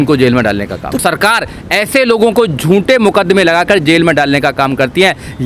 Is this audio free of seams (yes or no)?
no